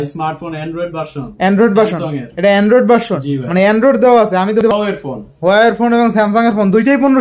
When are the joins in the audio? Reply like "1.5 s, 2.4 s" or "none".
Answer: 4.6 s